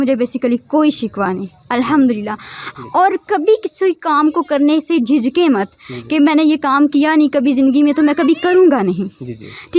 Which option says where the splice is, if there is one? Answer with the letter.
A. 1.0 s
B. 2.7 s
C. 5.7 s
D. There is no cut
B